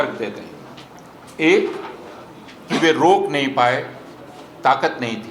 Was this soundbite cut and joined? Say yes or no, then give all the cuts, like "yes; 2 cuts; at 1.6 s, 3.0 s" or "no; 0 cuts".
no; 0 cuts